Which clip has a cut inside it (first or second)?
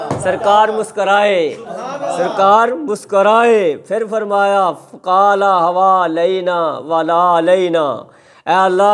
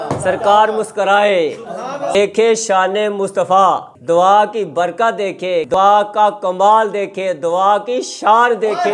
second